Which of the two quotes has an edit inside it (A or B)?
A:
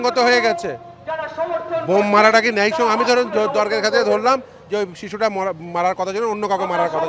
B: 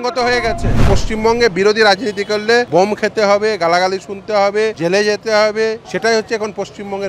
B